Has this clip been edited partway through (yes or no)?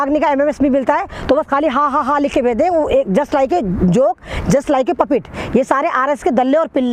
no